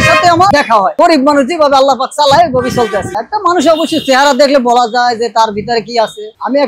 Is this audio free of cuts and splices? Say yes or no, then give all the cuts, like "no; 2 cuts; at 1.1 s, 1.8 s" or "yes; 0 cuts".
no; 1 cut; at 0.9 s